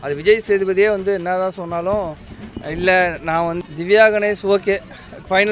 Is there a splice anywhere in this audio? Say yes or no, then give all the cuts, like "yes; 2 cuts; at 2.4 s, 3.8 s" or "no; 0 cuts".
yes; 1 cut; at 3.6 s